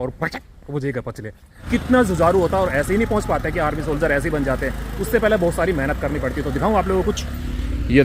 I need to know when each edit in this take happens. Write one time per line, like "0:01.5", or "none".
0:01.5